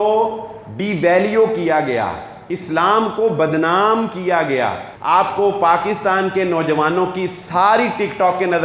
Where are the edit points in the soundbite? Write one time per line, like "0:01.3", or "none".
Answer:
0:04.9